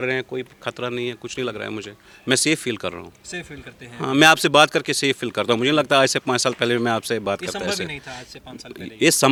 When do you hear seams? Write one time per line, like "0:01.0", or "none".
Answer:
none